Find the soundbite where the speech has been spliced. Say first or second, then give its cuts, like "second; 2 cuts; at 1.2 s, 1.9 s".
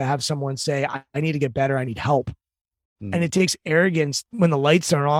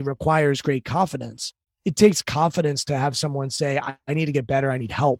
first; 1 cut; at 4.2 s